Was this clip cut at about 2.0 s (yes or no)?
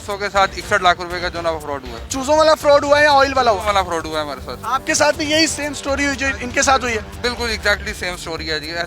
no